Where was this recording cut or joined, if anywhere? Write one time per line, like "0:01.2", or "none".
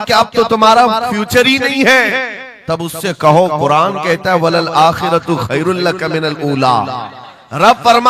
none